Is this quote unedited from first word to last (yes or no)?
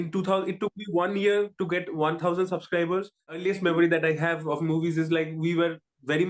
no